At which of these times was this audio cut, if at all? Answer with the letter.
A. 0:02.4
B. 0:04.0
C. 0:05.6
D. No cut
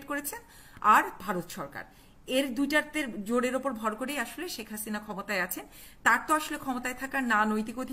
D